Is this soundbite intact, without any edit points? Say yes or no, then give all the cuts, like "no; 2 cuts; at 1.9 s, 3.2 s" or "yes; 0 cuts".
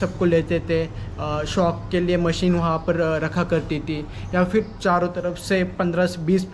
yes; 0 cuts